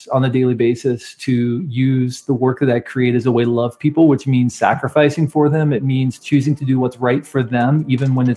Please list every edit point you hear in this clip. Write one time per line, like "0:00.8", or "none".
none